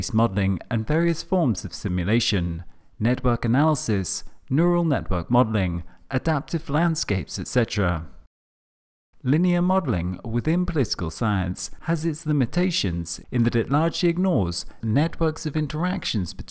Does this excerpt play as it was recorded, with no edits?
yes; 0 cuts

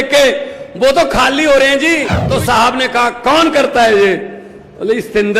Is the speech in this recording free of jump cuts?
no; 1 cut; at 2.1 s

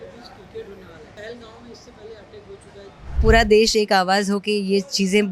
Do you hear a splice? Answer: yes; 2 cuts; at 1.1 s, 3.2 s

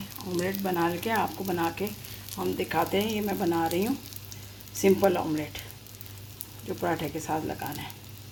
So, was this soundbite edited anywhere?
no; 0 cuts

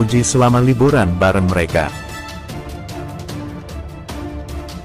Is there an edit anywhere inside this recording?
yes; 1 cut; at 1.9 s

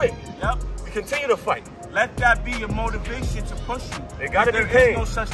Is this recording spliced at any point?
no; 0 cuts

